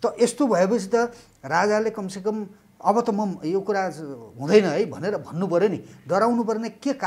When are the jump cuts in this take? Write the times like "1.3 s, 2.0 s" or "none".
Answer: none